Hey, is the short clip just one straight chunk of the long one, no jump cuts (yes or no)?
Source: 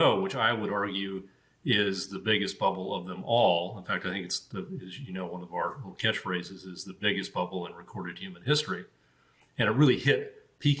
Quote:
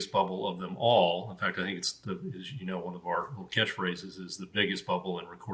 yes